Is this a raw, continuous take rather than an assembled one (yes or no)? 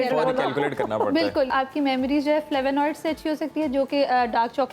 no